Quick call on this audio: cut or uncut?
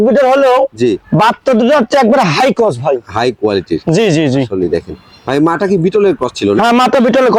uncut